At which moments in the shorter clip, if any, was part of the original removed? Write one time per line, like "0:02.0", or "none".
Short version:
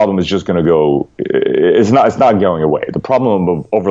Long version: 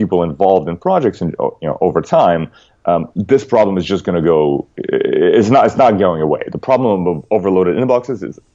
none